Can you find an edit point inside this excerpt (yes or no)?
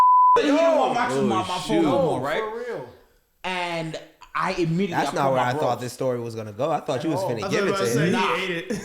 no